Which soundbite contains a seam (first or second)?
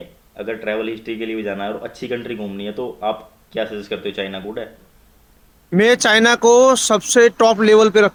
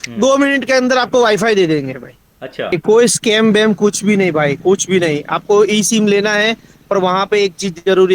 second